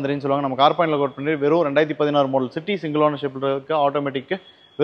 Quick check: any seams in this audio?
no; 0 cuts

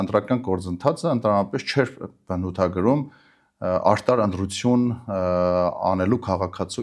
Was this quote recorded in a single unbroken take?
yes; 0 cuts

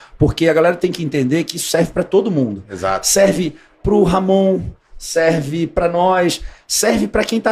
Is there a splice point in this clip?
no; 0 cuts

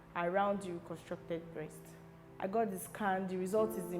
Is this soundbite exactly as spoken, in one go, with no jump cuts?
no; 1 cut; at 2.2 s

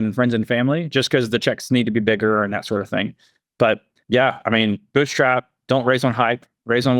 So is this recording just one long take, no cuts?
yes; 0 cuts

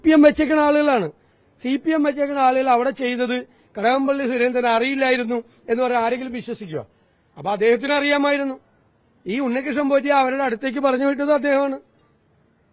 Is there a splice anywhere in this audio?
no; 0 cuts

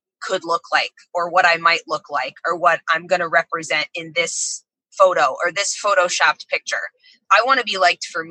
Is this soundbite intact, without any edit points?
no; 1 cut; at 7.1 s

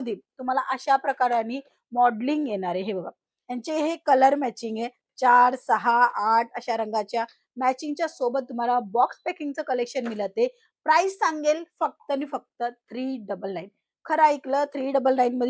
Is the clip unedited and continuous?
yes; 0 cuts

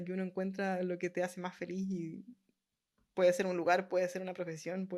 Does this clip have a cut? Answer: no; 0 cuts

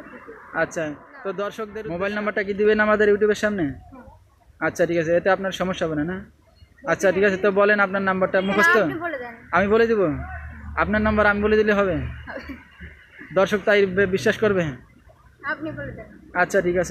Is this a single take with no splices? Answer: no; 1 cut; at 1.7 s

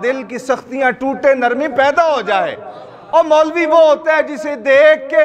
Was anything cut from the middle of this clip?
no; 0 cuts

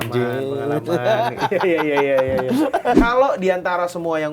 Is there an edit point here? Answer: yes; 1 cut; at 3.0 s

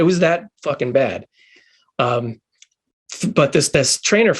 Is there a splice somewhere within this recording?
no; 0 cuts

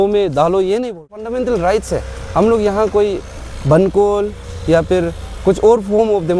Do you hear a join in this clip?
yes; 1 cut; at 1.2 s

